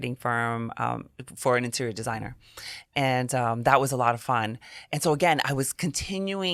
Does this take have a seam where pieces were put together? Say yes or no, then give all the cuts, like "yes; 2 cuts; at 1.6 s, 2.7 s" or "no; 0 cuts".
no; 0 cuts